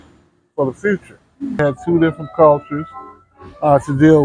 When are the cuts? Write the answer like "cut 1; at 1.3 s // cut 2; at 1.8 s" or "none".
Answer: cut 1; at 1.6 s